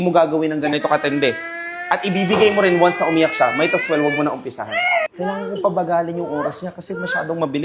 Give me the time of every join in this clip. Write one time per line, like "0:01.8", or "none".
0:00.8
0:05.1